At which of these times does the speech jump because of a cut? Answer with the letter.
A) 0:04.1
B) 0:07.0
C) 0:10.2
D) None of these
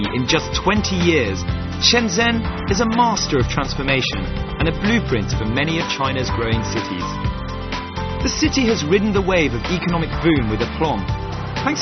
C